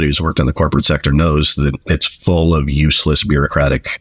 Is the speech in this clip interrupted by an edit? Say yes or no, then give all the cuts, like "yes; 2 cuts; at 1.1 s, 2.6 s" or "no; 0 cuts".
no; 0 cuts